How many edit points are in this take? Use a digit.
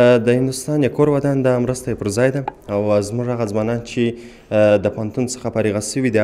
0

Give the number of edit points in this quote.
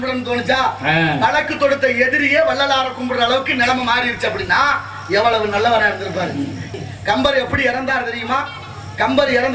1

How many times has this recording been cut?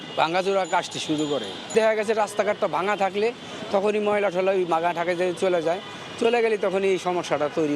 0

